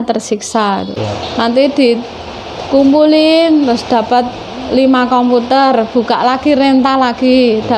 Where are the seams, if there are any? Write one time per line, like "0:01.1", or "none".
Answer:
0:01.0